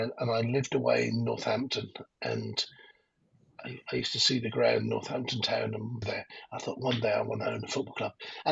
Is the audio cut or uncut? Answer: cut